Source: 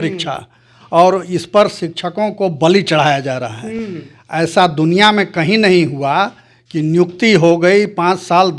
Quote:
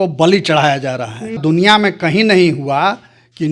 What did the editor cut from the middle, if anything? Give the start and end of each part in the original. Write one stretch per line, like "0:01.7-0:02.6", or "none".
0:03.8-0:04.7